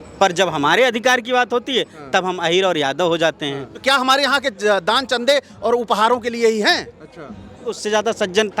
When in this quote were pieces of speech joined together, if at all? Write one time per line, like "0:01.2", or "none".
0:03.7
0:07.7